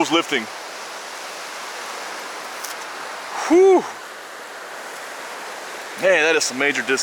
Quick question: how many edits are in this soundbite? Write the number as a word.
one